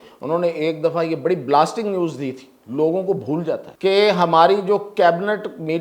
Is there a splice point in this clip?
yes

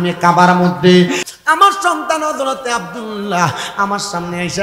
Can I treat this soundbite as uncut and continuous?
no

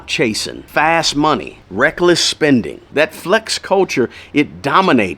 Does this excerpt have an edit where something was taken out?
yes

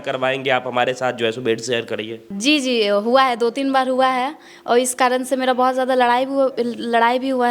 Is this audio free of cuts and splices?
no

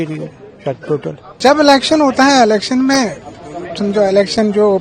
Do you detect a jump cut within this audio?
yes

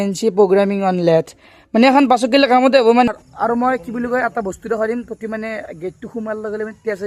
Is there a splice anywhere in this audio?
yes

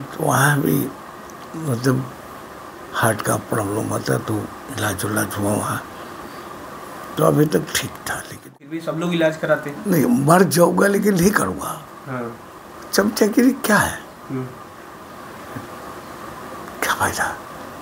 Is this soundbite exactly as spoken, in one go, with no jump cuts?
no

